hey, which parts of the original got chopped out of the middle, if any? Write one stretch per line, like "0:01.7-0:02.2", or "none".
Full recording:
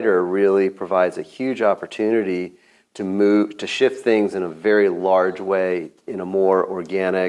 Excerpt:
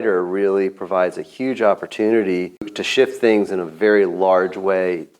0:02.8-0:03.6